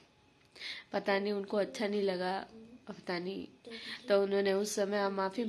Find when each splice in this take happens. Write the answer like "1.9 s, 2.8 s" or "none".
none

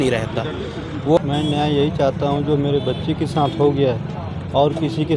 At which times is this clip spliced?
1.2 s

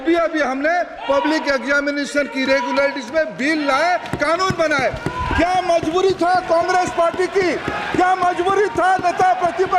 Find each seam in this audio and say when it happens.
none

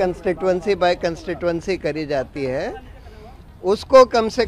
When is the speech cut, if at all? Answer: none

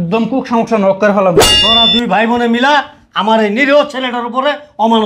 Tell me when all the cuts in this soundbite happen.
1.4 s

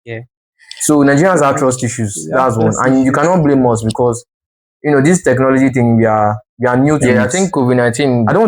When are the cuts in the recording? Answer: 7.0 s

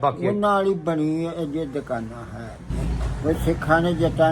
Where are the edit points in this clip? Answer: 2.8 s

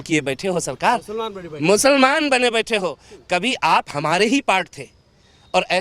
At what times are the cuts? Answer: none

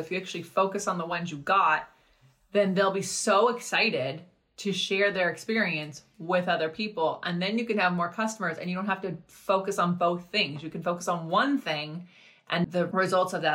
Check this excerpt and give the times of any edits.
12.6 s

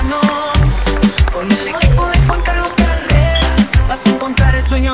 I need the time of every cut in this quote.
none

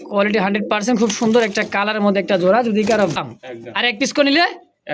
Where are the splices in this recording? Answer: 3.2 s

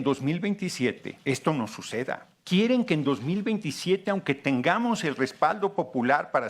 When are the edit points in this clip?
1.1 s, 2.3 s

